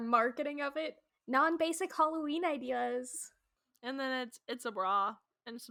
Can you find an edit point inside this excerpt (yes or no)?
no